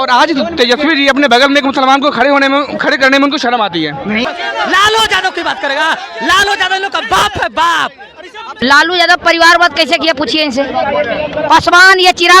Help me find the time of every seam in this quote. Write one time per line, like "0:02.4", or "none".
0:04.2
0:08.6